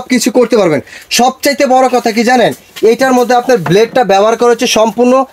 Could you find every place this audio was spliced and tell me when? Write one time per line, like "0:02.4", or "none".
none

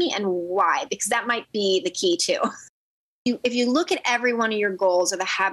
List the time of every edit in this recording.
0:03.2

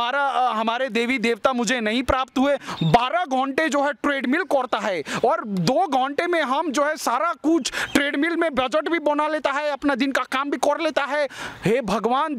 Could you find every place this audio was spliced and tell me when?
0:02.7

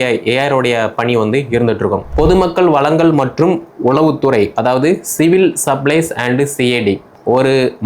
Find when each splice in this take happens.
0:02.0

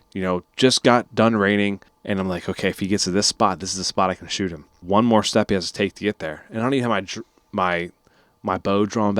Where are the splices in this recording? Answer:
0:01.9
0:04.8

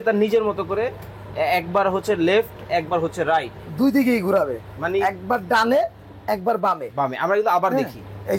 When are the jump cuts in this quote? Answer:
none

